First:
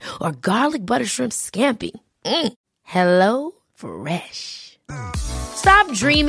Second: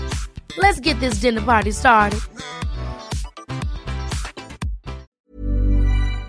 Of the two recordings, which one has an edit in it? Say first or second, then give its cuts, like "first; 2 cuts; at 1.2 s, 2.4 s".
second; 1 cut; at 5.1 s